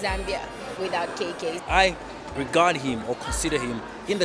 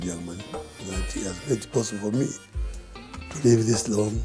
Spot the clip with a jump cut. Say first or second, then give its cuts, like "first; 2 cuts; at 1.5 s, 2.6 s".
first; 1 cut; at 1.6 s